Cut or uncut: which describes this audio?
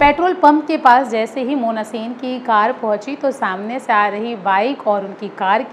uncut